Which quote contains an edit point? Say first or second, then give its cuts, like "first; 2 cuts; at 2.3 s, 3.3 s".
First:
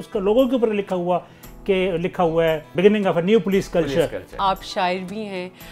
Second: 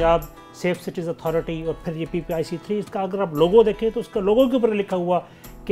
first; 2 cuts; at 2.7 s, 4.3 s